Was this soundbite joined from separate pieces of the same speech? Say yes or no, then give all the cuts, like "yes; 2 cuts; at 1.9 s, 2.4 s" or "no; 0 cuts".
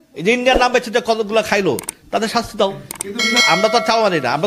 yes; 1 cut; at 3.4 s